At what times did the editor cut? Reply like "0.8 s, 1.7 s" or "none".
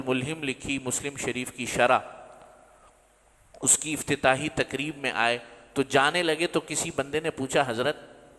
none